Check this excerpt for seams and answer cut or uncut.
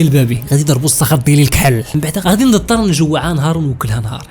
cut